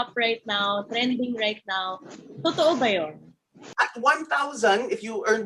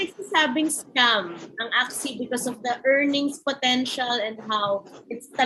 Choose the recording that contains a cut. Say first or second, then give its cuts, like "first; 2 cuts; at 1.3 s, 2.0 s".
first; 1 cut; at 3.6 s